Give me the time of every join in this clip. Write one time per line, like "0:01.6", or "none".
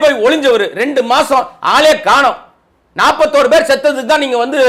none